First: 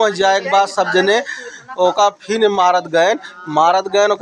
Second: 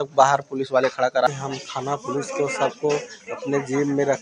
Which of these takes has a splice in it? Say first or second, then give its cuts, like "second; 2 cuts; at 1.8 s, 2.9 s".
second; 1 cut; at 1.3 s